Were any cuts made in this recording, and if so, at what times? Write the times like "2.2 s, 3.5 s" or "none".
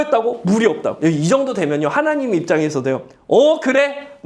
1.0 s